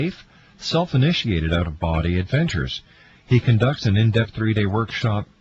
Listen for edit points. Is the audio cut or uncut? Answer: cut